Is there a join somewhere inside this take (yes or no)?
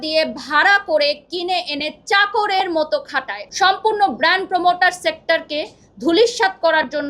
yes